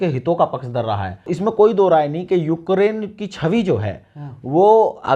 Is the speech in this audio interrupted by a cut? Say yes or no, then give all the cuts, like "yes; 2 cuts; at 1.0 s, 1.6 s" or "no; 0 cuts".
yes; 1 cut; at 1.3 s